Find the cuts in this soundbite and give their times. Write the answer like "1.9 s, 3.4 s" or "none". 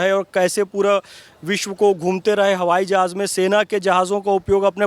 none